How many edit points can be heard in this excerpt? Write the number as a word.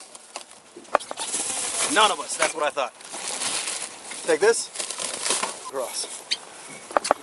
one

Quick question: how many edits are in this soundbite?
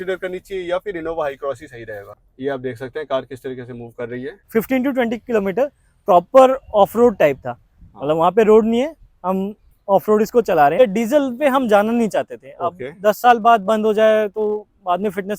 three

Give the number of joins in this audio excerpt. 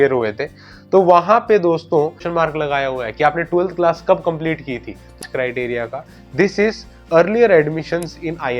two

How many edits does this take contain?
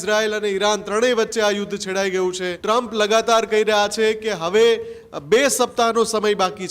one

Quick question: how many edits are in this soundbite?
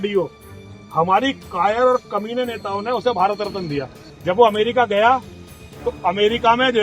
one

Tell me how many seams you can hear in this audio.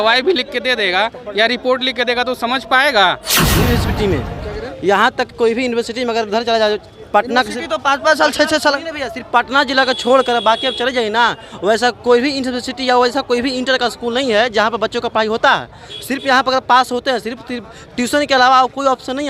one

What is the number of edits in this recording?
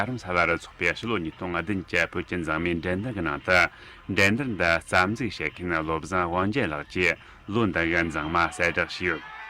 zero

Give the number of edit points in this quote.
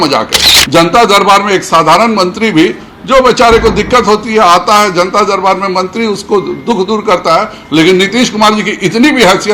zero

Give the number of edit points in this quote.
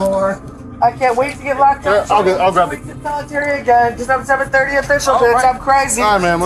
zero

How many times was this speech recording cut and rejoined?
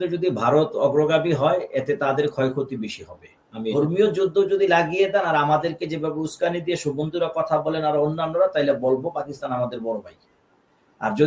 one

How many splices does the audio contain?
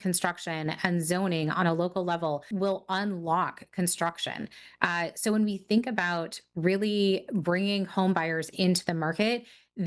one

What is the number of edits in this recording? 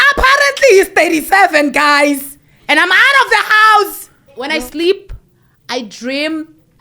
one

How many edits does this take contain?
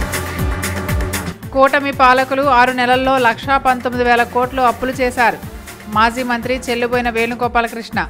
one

